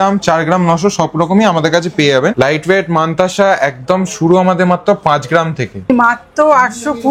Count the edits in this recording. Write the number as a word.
two